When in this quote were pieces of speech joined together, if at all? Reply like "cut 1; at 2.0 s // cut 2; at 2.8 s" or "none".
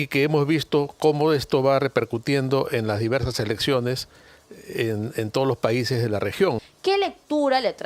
cut 1; at 6.6 s